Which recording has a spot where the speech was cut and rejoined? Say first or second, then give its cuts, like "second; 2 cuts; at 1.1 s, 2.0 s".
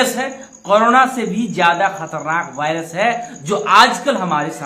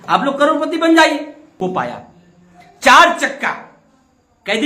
second; 1 cut; at 1.6 s